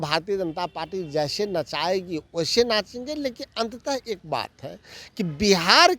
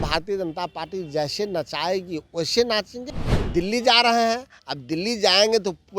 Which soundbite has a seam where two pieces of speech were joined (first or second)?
second